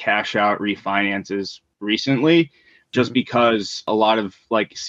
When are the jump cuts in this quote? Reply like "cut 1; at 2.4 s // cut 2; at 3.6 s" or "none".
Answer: cut 1; at 2.9 s // cut 2; at 3.9 s